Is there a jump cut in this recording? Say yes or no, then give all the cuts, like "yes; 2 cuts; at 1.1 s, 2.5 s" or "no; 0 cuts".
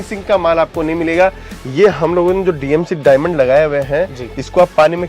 yes; 1 cut; at 1.5 s